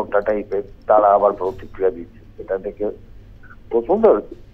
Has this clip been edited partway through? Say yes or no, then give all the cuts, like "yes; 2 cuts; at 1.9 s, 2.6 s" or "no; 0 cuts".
no; 0 cuts